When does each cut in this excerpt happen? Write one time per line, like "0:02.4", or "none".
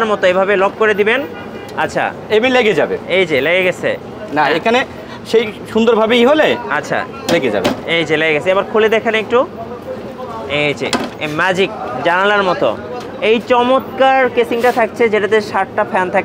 none